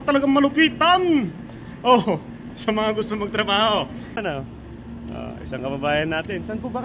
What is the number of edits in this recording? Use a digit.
1